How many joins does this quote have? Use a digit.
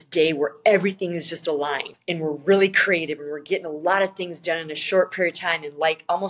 1